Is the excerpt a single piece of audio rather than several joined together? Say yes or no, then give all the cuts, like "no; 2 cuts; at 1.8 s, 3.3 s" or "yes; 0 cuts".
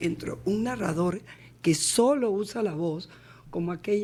yes; 0 cuts